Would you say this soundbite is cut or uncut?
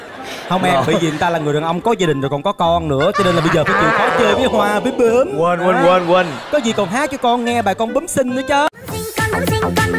uncut